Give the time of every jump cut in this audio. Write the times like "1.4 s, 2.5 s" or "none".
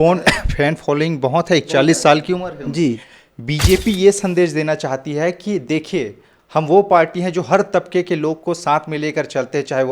3.1 s